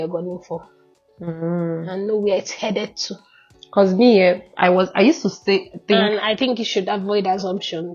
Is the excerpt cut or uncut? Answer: uncut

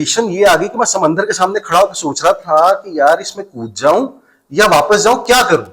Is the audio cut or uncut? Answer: uncut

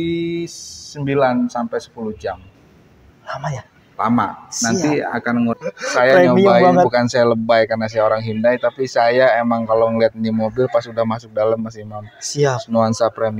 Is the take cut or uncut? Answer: cut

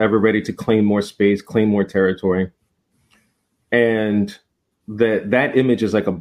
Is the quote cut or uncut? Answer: uncut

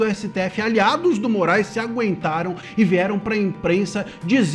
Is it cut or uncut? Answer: uncut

